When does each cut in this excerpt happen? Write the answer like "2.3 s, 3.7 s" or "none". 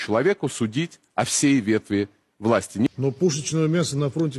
2.9 s